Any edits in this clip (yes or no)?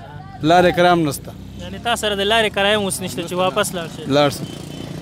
no